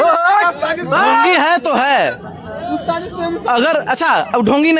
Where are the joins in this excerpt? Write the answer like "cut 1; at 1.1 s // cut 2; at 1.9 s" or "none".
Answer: none